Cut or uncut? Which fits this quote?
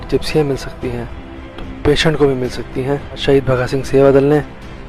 cut